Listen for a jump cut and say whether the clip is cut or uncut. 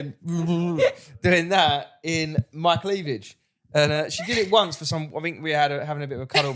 uncut